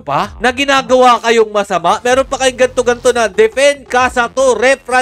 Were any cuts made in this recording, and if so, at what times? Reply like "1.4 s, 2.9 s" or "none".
none